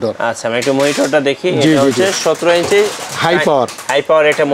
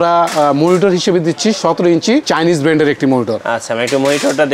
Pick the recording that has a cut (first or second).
second